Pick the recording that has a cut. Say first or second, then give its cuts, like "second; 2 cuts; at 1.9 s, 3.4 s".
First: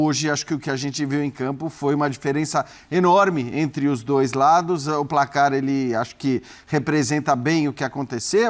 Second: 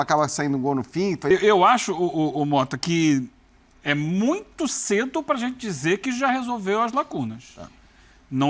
second; 1 cut; at 1.3 s